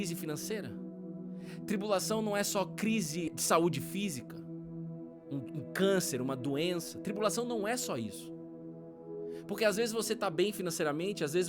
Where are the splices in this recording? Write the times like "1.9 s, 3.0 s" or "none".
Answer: 3.3 s